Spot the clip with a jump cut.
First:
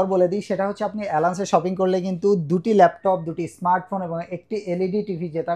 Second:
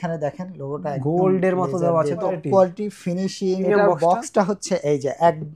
second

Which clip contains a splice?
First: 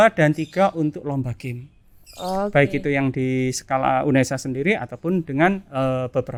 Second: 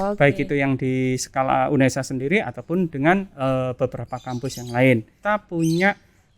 second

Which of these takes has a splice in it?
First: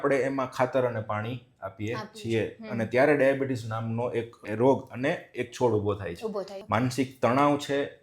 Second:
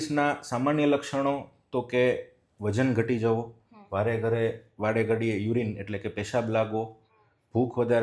first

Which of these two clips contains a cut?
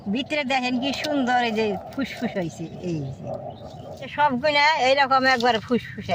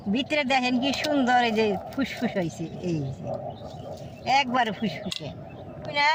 first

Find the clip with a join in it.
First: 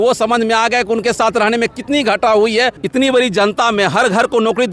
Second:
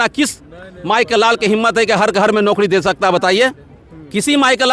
first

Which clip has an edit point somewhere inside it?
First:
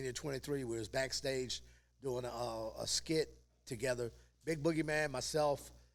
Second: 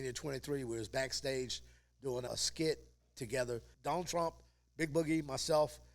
second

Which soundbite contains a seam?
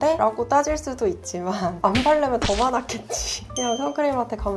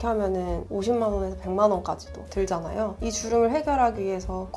second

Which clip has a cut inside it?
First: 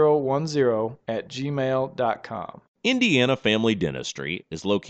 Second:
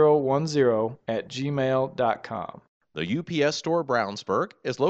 second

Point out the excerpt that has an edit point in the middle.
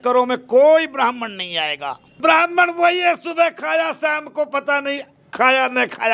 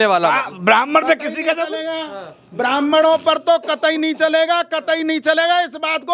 first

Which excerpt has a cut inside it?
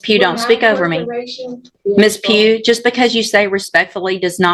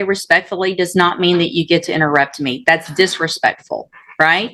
first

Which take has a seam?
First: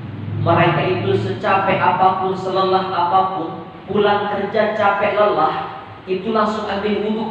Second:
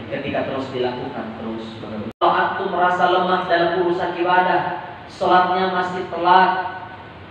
second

